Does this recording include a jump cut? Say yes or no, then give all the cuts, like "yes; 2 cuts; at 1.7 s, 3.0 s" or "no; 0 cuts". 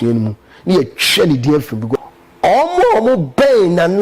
yes; 1 cut; at 2.0 s